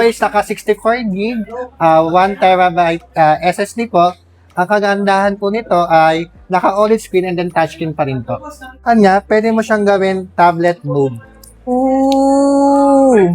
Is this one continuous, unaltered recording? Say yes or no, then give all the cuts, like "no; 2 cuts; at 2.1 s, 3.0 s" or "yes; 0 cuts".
no; 1 cut; at 8.8 s